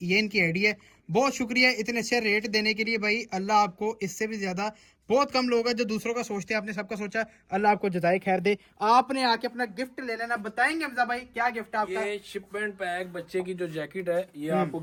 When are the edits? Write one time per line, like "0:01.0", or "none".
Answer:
none